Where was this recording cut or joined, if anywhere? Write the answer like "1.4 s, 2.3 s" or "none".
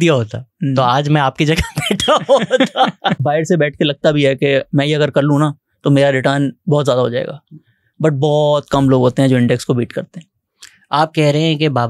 3.2 s